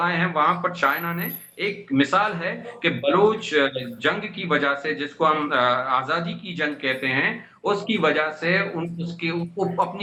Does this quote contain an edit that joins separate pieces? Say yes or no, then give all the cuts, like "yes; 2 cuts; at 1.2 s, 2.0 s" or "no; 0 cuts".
no; 0 cuts